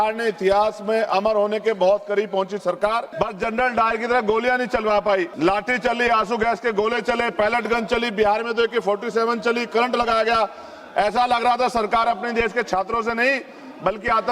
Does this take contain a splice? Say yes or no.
yes